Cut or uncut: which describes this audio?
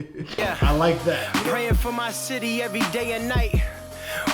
cut